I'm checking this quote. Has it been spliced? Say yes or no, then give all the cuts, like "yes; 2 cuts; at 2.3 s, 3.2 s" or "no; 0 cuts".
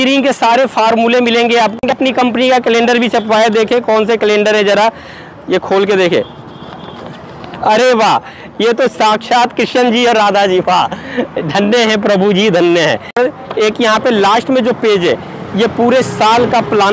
yes; 2 cuts; at 1.8 s, 13.2 s